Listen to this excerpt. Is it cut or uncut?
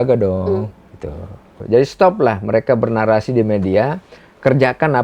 cut